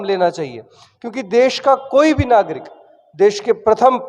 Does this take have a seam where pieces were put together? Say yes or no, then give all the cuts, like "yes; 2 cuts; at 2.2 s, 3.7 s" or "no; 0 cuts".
no; 0 cuts